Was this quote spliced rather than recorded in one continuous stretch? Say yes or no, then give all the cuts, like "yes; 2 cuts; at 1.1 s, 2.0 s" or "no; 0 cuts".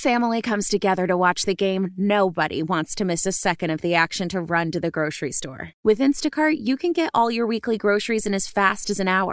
no; 0 cuts